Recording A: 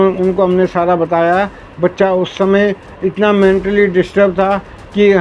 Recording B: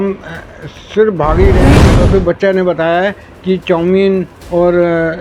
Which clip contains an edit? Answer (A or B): B